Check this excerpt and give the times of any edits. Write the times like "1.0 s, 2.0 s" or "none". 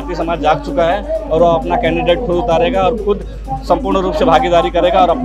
none